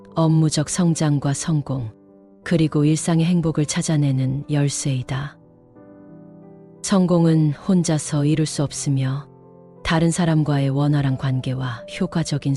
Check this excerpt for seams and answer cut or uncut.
cut